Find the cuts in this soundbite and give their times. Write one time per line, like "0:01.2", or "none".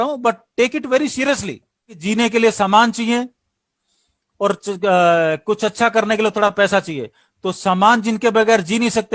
0:02.0